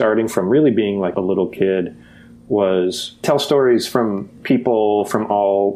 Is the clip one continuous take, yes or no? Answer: no